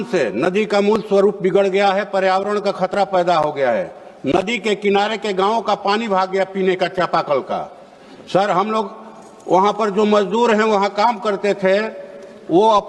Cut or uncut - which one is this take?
uncut